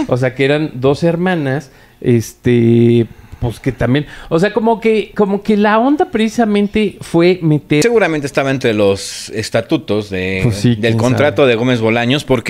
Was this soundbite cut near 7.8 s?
yes; 1 cut; at 7.8 s

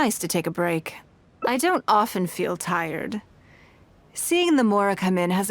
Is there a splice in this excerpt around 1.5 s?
yes; 1 cut; at 1.5 s

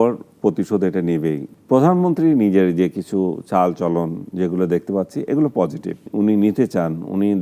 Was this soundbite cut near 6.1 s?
yes; 2 cuts; at 1.5 s, 6.1 s

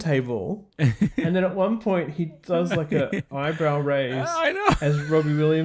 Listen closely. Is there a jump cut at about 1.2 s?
yes; 1 cut; at 1.2 s

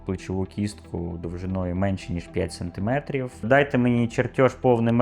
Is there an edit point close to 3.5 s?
yes; 1 cut; at 3.5 s

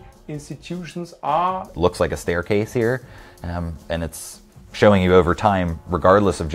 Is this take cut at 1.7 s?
yes; 1 cut; at 1.7 s

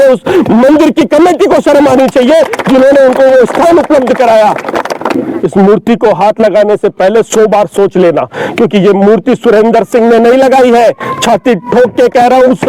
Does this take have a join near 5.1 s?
yes; 1 cut; at 5.1 s

